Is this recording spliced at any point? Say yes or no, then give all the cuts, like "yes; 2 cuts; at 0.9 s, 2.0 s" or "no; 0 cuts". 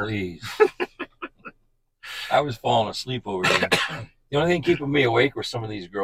no; 0 cuts